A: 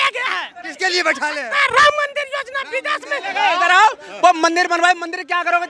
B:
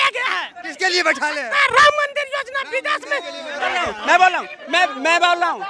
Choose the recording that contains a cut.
A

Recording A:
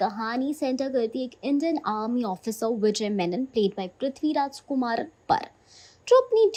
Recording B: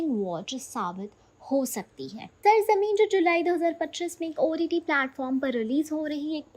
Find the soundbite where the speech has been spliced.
B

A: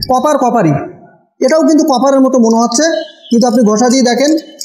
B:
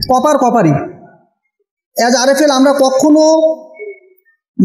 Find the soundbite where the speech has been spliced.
A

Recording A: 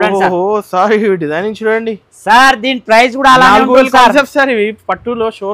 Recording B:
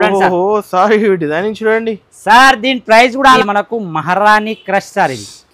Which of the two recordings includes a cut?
B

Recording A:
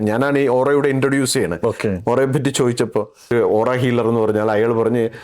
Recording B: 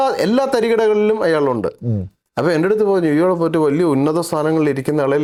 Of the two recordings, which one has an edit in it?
A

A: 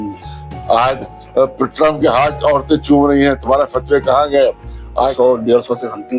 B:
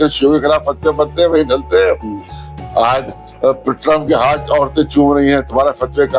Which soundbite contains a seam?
A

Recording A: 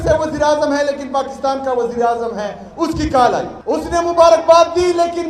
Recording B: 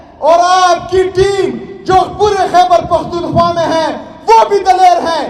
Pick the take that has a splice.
A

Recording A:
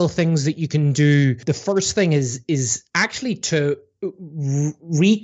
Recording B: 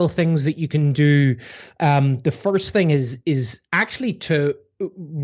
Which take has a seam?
A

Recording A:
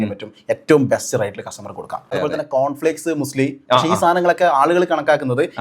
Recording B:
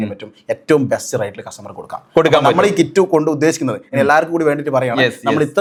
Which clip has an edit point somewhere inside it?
A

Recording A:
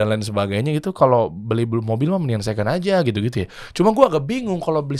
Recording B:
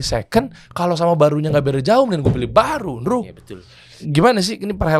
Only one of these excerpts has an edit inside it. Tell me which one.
B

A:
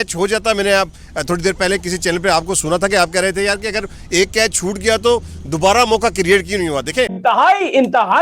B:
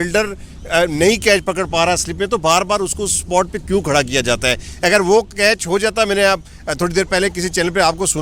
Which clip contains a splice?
A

